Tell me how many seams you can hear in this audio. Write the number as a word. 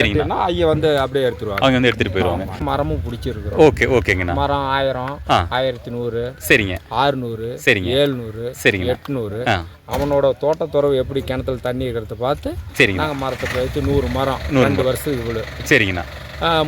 one